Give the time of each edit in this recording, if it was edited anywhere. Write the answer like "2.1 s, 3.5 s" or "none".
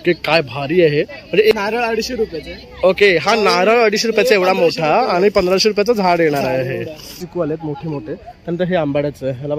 1.5 s, 7.1 s